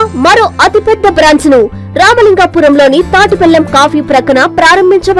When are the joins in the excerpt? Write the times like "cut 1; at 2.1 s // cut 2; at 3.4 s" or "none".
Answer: none